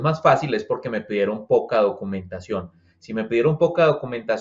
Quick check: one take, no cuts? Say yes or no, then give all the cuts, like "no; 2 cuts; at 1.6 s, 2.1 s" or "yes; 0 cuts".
yes; 0 cuts